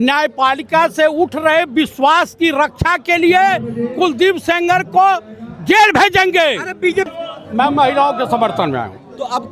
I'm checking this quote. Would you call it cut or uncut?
cut